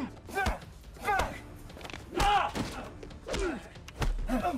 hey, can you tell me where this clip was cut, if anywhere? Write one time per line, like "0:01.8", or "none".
0:02.8